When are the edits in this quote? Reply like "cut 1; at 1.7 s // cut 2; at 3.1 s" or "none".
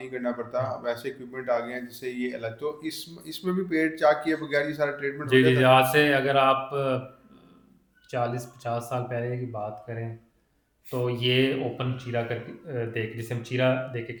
none